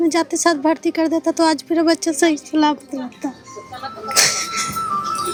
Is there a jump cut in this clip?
no; 0 cuts

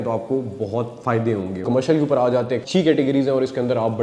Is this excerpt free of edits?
no; 2 cuts; at 1.6 s, 2.6 s

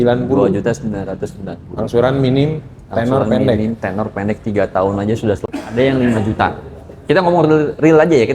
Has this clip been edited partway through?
yes; 1 cut; at 5.5 s

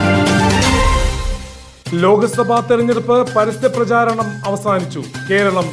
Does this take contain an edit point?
yes; 1 cut; at 1.3 s

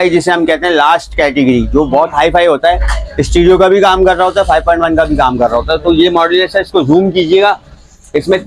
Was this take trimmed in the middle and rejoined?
no; 0 cuts

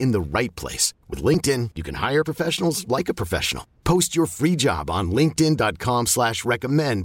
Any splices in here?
no; 0 cuts

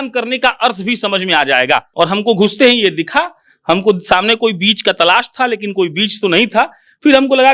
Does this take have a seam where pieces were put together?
yes; 1 cut; at 1.9 s

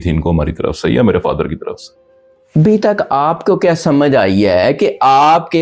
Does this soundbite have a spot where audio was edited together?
no; 0 cuts

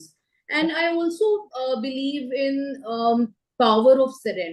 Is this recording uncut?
yes; 0 cuts

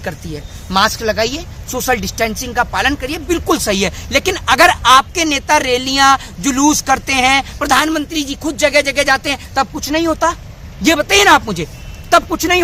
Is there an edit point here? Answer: no; 0 cuts

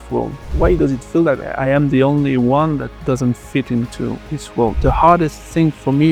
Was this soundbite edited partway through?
yes; 2 cuts; at 1.5 s, 4.8 s

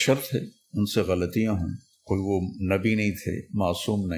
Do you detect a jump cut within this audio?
no; 0 cuts

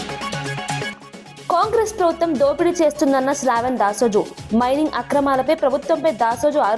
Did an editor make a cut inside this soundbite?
no; 0 cuts

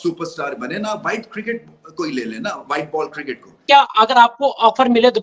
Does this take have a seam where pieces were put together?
yes; 1 cut; at 3.6 s

